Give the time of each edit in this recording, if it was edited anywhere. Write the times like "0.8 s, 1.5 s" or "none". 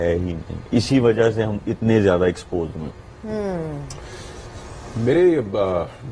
none